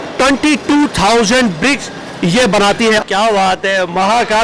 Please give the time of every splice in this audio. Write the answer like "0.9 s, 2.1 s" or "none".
3.0 s